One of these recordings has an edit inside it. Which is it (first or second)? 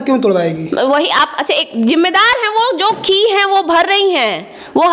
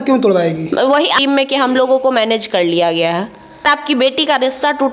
second